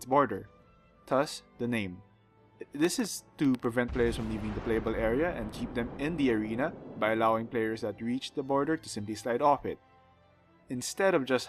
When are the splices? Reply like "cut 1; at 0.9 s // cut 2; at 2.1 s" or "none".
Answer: cut 1; at 3.2 s